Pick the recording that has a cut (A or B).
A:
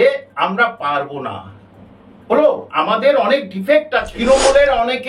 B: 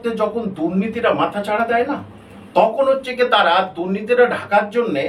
A